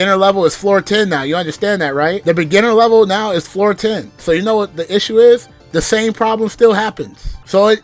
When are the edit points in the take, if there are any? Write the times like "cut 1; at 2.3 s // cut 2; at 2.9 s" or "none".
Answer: none

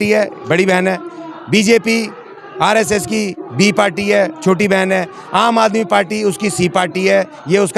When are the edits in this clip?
none

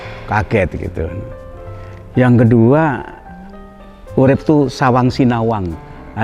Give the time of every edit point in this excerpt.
none

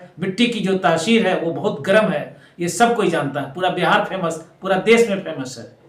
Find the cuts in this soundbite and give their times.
none

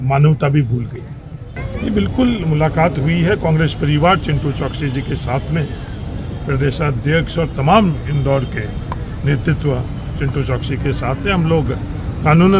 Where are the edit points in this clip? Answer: none

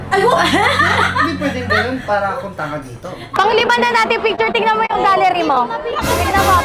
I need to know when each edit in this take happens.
cut 1; at 3.3 s

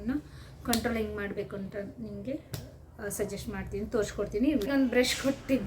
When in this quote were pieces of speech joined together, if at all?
cut 1; at 4.7 s

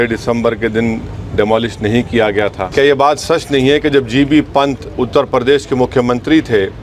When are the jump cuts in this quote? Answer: cut 1; at 2.6 s

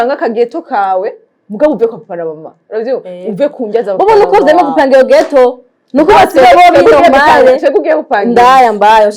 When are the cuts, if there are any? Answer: none

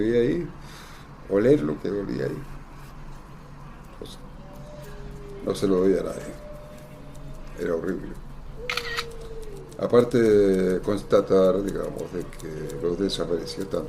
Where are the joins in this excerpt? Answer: cut 1; at 10.9 s

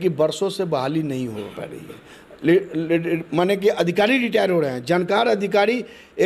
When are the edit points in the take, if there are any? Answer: none

